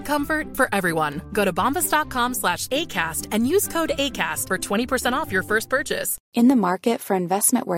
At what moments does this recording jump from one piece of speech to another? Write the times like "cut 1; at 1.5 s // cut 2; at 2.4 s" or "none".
cut 1; at 6.2 s